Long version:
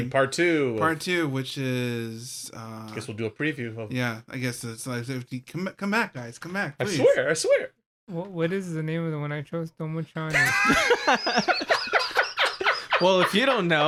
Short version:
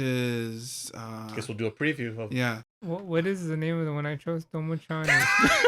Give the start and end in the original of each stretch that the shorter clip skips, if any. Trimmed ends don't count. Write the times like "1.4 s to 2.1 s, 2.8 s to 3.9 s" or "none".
4.2 s to 7.9 s